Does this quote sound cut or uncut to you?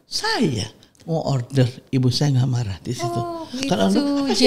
uncut